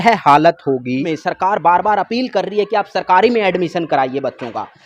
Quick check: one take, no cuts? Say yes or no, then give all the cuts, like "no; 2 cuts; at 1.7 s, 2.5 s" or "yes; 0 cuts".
no; 1 cut; at 1.1 s